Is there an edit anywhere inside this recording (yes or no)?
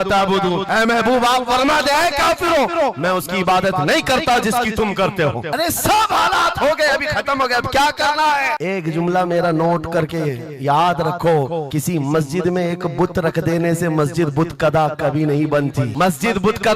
no